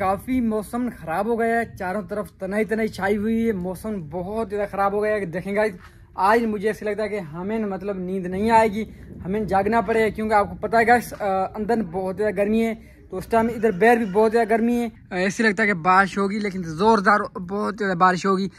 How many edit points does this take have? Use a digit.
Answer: 0